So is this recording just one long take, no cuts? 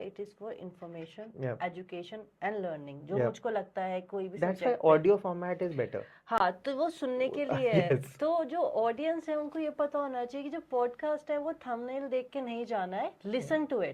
yes; 0 cuts

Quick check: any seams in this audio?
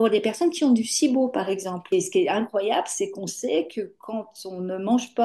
yes; 1 cut; at 1.8 s

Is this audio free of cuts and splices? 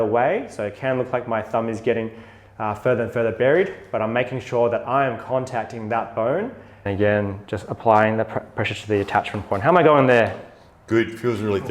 no; 1 cut; at 6.8 s

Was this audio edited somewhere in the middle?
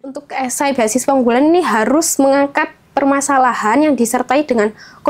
no; 0 cuts

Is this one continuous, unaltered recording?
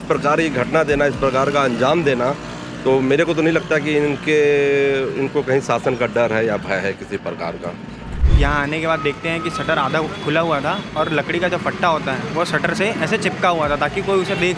no; 1 cut; at 8.2 s

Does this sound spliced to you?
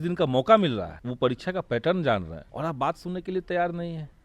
yes; 2 cuts; at 1.0 s, 2.4 s

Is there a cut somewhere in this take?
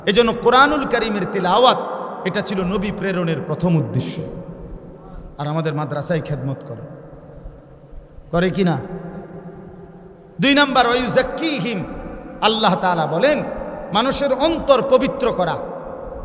no; 0 cuts

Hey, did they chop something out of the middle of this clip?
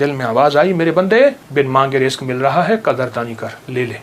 yes; 1 cut; at 1.4 s

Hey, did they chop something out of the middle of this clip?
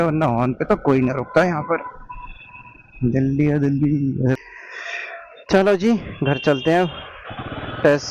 yes; 1 cut; at 4.4 s

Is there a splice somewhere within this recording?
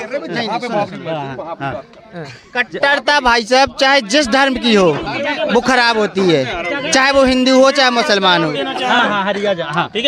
no; 0 cuts

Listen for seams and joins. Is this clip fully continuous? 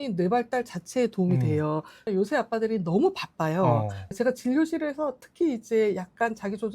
no; 2 cuts; at 1.9 s, 4.1 s

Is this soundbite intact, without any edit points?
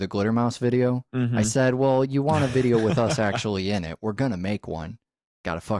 yes; 0 cuts

